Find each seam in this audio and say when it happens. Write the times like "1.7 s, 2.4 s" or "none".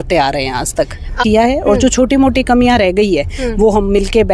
1.2 s